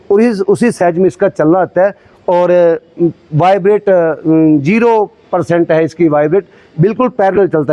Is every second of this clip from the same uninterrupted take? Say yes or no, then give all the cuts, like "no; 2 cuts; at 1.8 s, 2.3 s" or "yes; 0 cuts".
yes; 0 cuts